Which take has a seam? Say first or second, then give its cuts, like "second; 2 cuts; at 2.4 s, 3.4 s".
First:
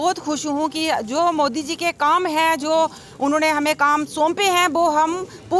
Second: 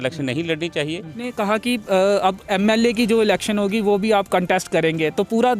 second; 1 cut; at 1.2 s